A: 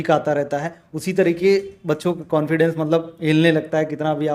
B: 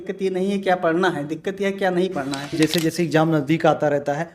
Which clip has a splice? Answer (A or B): B